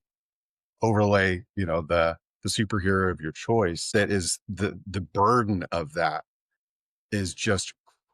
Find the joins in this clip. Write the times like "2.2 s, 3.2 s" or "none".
3.8 s